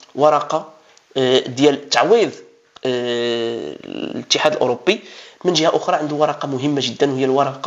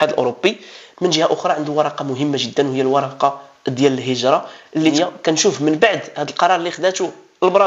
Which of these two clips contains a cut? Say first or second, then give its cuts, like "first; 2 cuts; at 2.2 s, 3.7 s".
second; 1 cut; at 4.9 s